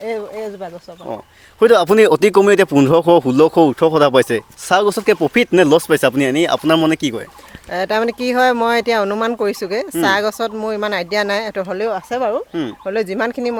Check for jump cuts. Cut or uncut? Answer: uncut